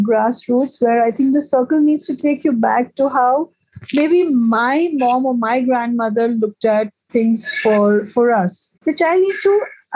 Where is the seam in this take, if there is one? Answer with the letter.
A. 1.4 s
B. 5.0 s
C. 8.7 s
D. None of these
C